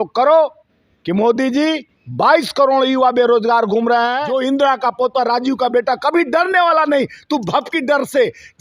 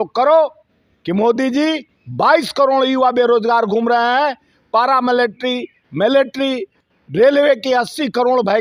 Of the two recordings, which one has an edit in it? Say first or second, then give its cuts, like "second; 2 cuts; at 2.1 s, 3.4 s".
first; 1 cut; at 4.2 s